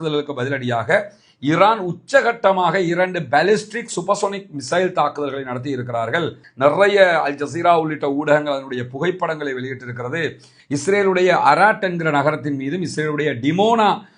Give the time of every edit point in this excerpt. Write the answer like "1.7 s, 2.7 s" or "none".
6.4 s